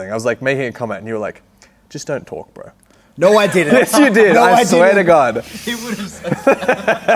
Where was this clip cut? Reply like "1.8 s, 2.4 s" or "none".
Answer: none